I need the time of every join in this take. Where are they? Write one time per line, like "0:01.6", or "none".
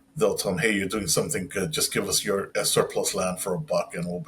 0:02.5